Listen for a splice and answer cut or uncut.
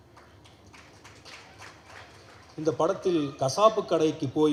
uncut